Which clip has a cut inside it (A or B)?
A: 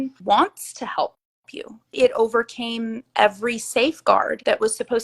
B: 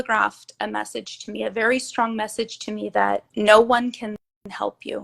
A